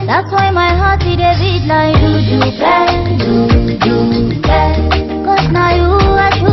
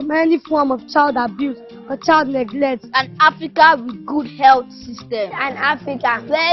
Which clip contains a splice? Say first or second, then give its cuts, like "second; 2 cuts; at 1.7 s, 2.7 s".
first; 1 cut; at 2.7 s